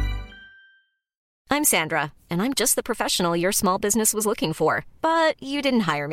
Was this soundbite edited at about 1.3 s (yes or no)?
yes